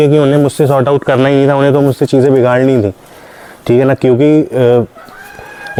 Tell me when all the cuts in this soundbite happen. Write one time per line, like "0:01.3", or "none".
none